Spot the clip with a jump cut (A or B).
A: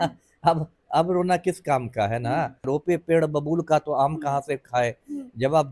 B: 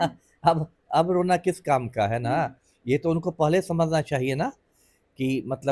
A